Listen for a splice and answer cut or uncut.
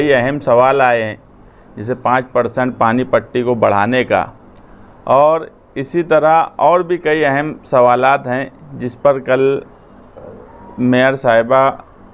uncut